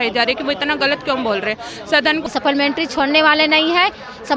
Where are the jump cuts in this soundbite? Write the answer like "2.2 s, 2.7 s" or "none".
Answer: 2.3 s

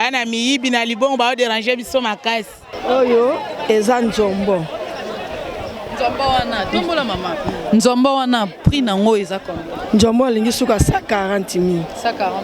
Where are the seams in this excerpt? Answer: 2.7 s

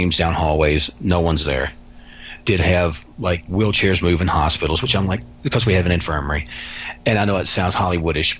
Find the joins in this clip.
none

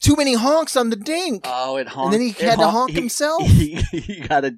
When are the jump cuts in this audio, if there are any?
none

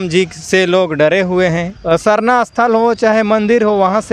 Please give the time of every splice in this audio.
1.7 s

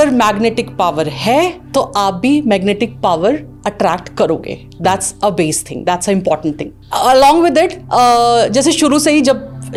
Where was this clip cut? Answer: none

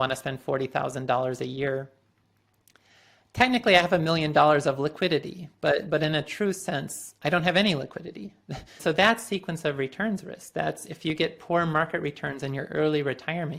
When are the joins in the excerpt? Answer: 8.8 s

